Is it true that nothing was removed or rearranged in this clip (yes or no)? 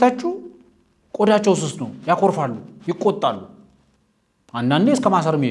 yes